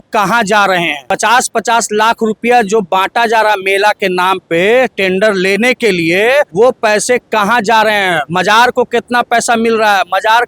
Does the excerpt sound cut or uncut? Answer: cut